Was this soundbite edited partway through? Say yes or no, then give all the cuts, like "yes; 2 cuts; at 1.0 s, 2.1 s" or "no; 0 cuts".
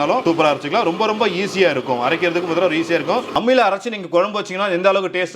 yes; 1 cut; at 3.3 s